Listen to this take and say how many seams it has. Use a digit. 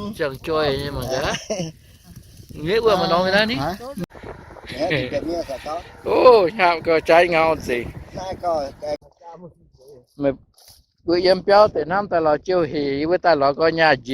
2